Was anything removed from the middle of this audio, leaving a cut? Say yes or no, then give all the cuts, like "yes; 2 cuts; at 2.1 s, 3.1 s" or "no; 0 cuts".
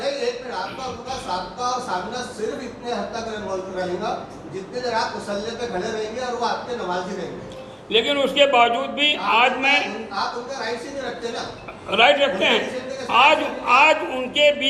no; 0 cuts